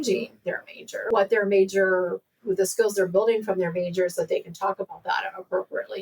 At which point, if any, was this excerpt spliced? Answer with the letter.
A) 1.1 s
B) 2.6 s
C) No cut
A